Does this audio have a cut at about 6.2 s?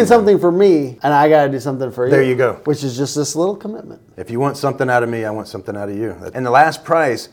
yes; 2 cuts; at 0.9 s, 6.2 s

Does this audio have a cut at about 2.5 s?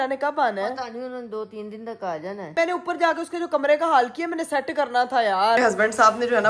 yes; 2 cuts; at 2.5 s, 5.6 s

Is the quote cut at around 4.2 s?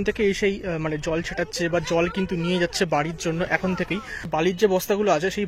yes; 1 cut; at 4.2 s

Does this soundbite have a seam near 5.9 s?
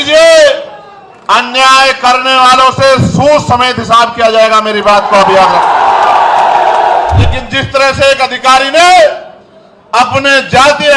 no; 1 cut; at 7.3 s

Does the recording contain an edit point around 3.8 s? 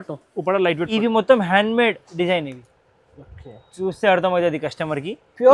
no; 1 cut; at 1.0 s

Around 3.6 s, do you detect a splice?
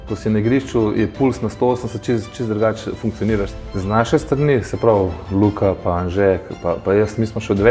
yes; 1 cut; at 3.6 s

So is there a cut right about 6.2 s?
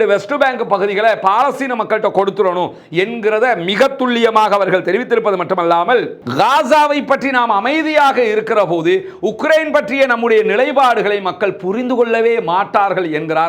yes; 1 cut; at 6.2 s

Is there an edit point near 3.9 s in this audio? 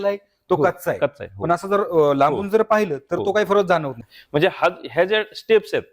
yes; 1 cut; at 3.9 s

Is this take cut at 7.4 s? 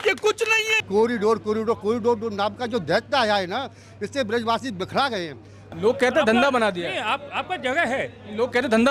no; 2 cuts; at 0.8 s, 5.7 s

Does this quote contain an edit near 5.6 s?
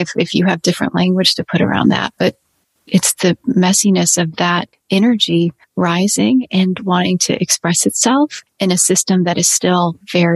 yes; 1 cut; at 5.6 s

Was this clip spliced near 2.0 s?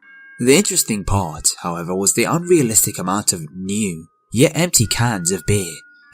no; 1 cut; at 4.9 s

